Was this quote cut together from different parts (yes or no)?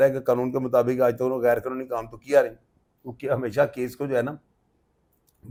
no